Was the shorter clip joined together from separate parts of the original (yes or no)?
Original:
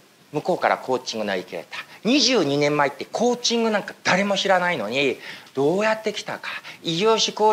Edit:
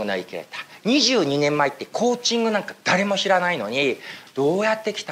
no